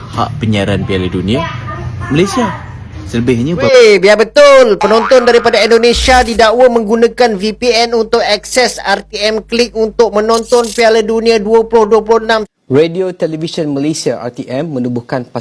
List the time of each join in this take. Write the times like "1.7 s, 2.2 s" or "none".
3.7 s, 12.4 s